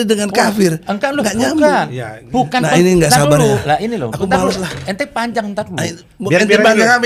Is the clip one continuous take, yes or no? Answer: yes